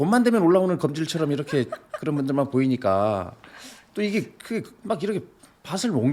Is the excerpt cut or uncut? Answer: uncut